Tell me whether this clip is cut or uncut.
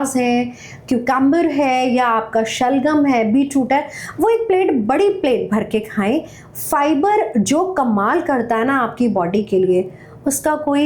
uncut